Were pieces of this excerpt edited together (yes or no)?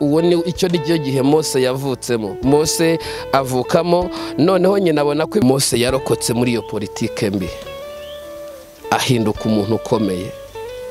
yes